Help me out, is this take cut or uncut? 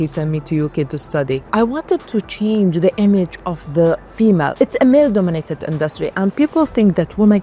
cut